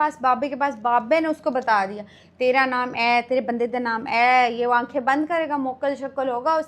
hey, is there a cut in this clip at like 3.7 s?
no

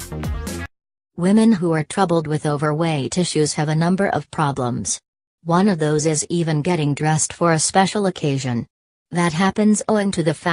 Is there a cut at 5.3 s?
no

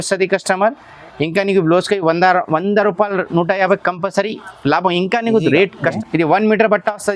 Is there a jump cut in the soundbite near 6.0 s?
yes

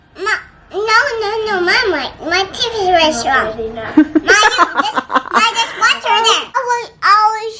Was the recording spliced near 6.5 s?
yes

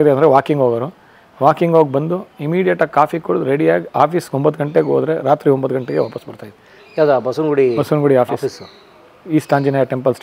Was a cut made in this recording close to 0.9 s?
no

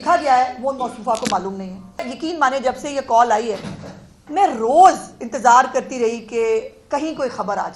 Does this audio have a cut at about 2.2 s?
yes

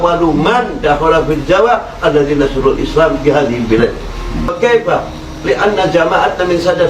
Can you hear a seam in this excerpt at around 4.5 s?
yes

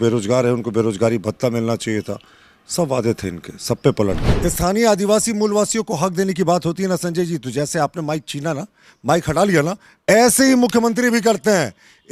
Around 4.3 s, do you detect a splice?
yes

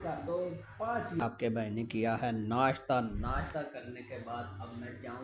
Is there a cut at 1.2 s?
yes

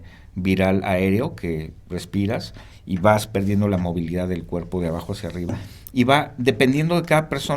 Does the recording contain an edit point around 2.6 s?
no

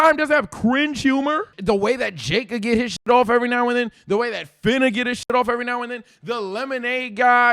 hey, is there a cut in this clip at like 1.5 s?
yes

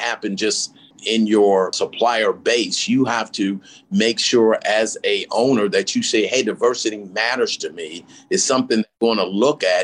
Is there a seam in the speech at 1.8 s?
yes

